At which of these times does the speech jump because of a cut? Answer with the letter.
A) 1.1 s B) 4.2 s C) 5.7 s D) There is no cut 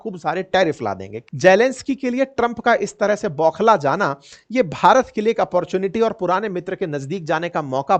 A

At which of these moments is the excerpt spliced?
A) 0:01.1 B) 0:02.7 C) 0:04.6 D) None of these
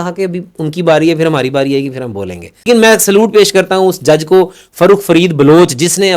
B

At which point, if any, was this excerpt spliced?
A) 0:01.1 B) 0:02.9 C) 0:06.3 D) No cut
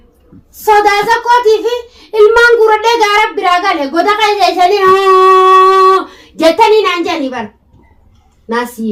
D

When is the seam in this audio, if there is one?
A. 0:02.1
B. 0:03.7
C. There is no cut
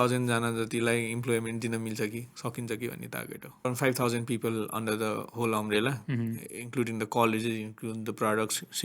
B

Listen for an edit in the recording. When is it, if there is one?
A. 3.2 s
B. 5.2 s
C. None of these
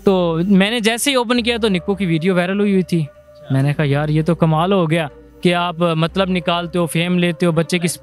B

